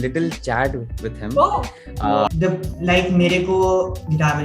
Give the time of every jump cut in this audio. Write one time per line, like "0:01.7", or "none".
0:02.3